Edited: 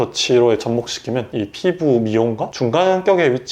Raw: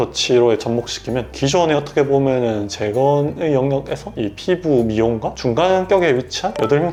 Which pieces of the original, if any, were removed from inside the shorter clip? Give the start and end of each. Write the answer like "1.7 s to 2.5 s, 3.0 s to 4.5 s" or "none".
1.3 s to 4.1 s